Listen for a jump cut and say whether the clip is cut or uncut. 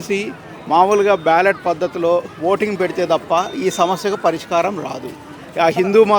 uncut